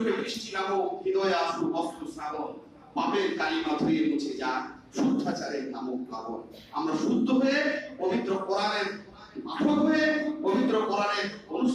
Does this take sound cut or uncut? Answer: uncut